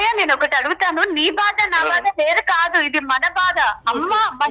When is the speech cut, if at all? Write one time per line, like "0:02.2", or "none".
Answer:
none